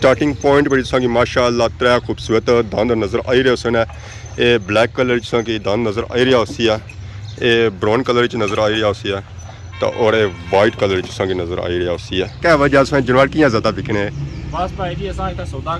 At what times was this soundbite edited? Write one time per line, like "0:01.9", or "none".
0:12.4